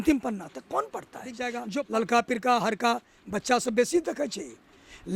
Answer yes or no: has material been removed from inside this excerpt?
yes